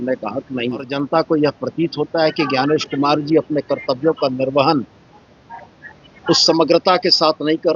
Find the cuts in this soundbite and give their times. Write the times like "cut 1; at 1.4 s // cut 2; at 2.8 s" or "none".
cut 1; at 0.9 s

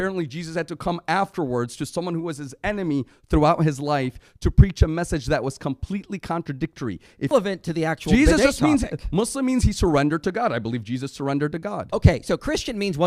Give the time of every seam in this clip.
cut 1; at 7.3 s

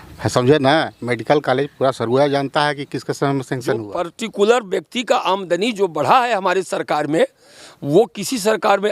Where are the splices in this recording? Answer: cut 1; at 3.9 s

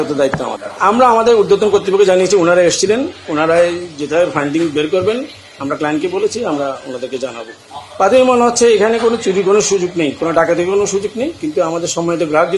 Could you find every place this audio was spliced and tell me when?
none

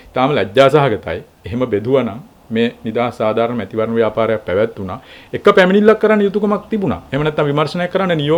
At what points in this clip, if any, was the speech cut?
none

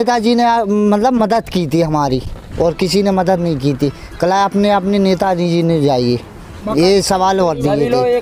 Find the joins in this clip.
none

